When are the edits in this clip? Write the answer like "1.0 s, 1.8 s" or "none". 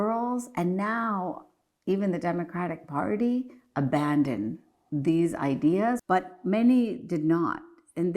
6.0 s